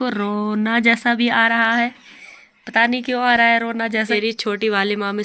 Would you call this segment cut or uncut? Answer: cut